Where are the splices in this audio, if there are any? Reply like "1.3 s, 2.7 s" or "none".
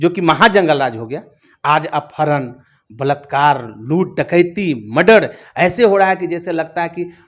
none